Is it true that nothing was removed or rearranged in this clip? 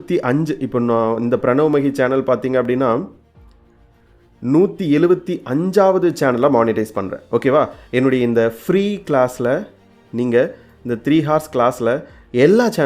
yes; 0 cuts

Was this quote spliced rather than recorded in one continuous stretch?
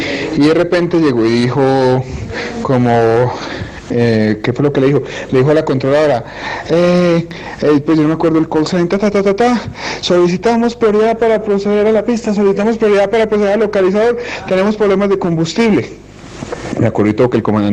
yes; 1 cut; at 1.7 s

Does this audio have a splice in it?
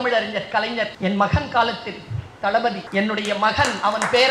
yes; 2 cuts; at 0.9 s, 2.8 s

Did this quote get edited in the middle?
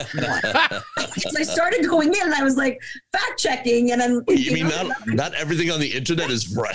no; 0 cuts

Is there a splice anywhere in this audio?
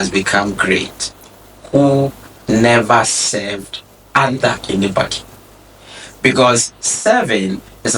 no; 0 cuts

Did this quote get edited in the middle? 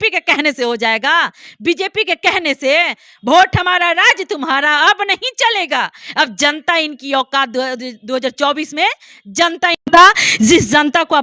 no; 0 cuts

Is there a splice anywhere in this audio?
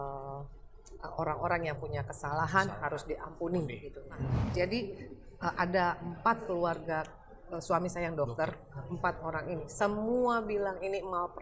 yes; 1 cut; at 4.3 s

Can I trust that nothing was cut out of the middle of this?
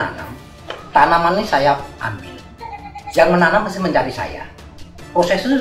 yes; 0 cuts

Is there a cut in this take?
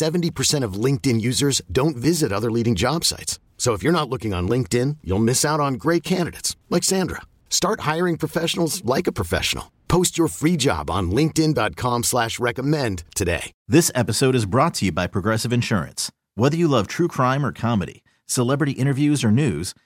yes; 1 cut; at 13.5 s

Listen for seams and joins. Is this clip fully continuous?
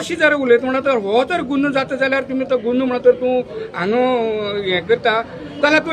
yes; 0 cuts

